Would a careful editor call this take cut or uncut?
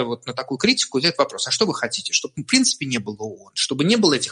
uncut